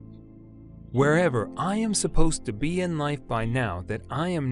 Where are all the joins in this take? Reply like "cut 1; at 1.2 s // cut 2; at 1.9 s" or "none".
none